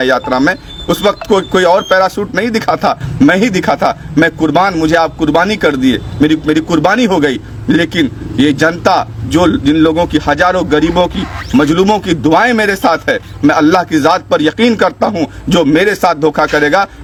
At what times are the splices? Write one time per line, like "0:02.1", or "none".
none